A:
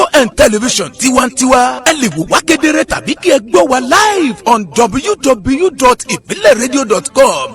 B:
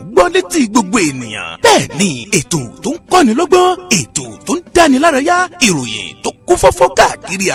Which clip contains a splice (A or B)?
A